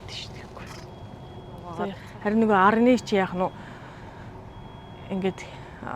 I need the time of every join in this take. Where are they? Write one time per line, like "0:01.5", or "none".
0:02.0